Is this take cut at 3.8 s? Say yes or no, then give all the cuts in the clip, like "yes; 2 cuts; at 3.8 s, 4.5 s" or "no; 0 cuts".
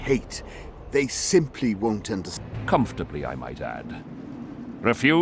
no; 1 cut; at 2.3 s